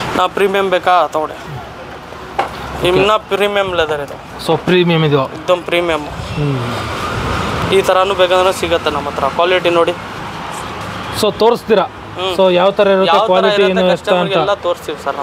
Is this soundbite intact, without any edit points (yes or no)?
yes